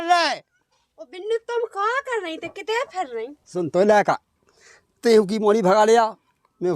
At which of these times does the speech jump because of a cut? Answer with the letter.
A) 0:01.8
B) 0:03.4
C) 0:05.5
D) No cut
B